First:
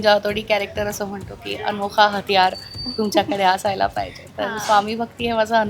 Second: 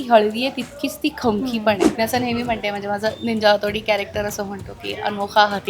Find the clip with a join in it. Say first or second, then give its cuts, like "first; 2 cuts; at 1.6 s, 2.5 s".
second; 1 cut; at 1.9 s